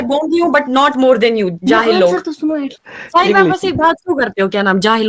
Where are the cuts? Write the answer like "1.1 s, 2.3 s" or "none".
2.8 s